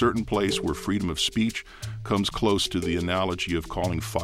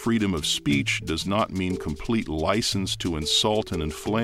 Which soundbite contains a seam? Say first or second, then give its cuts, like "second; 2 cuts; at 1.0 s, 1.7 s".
first; 1 cut; at 1.6 s